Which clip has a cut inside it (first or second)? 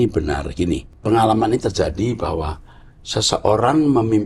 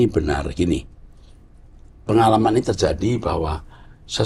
first